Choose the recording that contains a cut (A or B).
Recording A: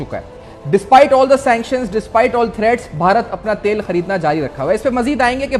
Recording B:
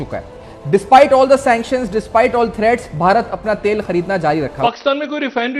B